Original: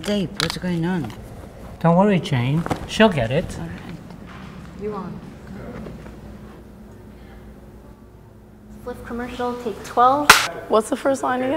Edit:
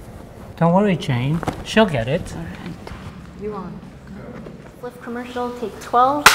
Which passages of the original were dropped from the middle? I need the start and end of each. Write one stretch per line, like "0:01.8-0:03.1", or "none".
0:04.1-0:04.3
0:06.1-0:08.7